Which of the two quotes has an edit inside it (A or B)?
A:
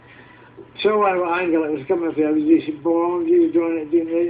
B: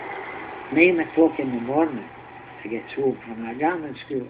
A